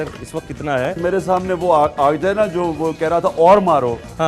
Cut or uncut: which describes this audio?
cut